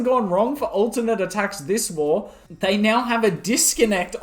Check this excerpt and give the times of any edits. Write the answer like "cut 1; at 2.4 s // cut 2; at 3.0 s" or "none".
cut 1; at 2.4 s